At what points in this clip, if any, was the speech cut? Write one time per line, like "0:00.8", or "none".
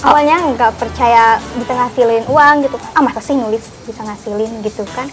none